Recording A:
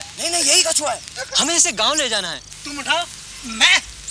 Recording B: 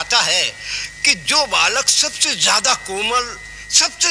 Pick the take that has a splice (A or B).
A